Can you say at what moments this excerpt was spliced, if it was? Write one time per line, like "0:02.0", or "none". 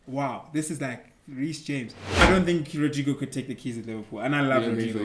0:02.2